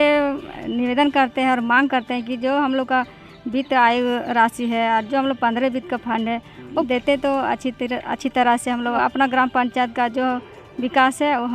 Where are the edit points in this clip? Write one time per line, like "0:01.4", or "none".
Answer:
0:06.8
0:09.0